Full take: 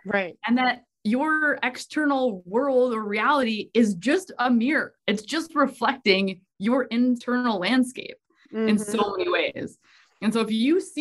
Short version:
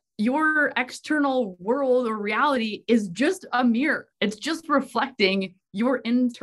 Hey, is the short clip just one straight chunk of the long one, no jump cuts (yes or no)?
yes